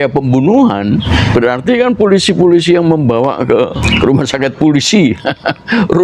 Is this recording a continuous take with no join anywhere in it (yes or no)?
no